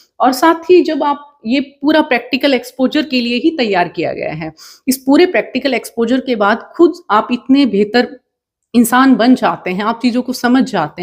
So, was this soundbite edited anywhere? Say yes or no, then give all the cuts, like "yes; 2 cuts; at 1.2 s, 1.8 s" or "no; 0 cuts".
no; 0 cuts